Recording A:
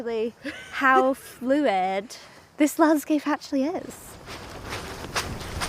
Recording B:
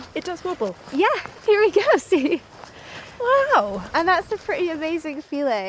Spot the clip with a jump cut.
A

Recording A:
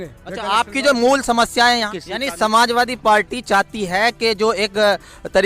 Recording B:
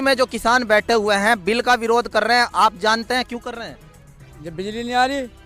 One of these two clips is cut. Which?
A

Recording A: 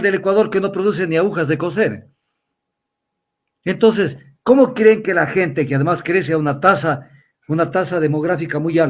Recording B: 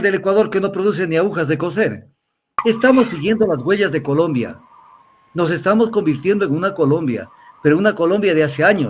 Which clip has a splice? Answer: B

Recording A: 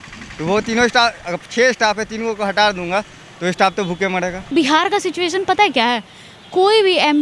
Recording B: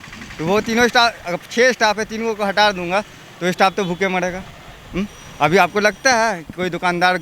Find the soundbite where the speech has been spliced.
A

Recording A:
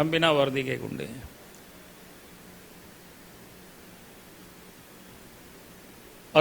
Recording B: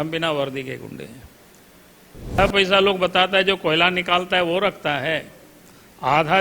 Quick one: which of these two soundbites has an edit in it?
B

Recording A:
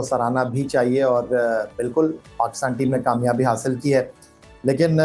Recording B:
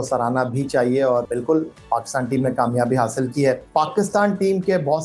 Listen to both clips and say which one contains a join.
B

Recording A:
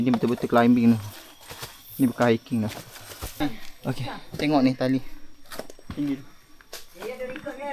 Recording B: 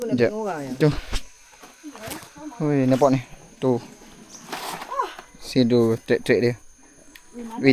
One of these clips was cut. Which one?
A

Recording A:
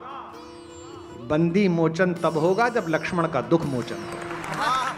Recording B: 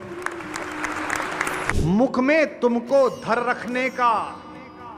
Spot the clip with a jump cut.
B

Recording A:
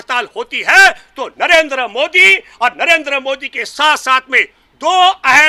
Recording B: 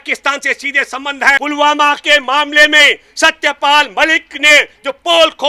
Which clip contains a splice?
B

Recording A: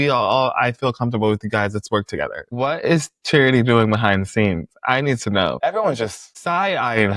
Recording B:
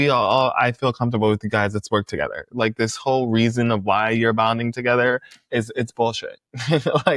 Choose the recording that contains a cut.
A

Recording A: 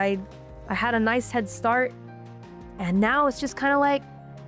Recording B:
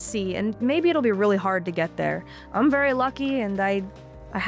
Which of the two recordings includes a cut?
B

